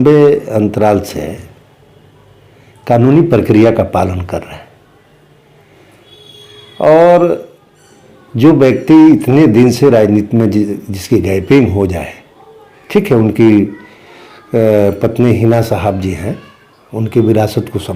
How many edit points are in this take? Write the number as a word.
zero